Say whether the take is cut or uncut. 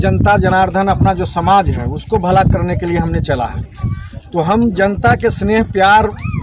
uncut